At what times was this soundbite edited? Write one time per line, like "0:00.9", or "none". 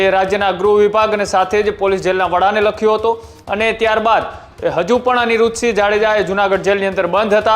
none